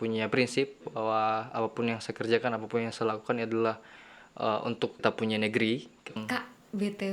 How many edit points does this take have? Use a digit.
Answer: 2